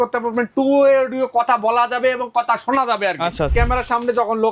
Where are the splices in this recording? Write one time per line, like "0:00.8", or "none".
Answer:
0:03.5